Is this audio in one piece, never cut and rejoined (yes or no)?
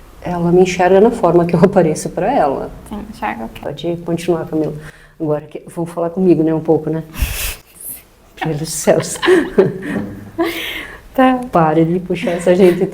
no